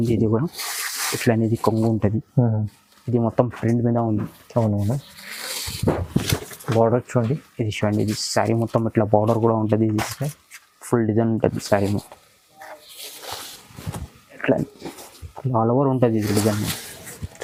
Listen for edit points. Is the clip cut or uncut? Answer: uncut